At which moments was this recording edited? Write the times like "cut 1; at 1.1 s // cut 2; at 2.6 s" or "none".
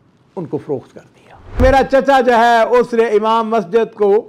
cut 1; at 1.6 s